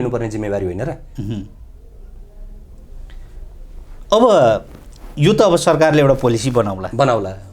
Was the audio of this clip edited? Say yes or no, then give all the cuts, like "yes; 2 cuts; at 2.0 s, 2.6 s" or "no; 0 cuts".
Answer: no; 0 cuts